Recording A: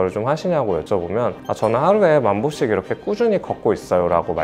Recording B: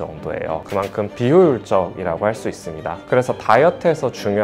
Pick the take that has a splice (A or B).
B